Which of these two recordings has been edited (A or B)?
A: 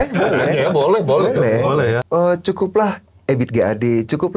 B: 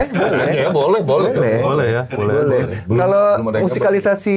A